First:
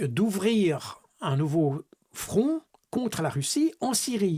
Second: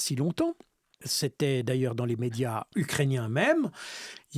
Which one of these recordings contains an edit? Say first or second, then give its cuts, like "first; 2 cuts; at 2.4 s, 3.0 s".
second; 2 cuts; at 1.1 s, 2.7 s